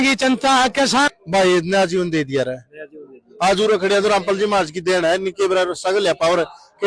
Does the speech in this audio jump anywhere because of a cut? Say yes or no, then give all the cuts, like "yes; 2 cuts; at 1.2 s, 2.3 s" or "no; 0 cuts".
yes; 1 cut; at 1.1 s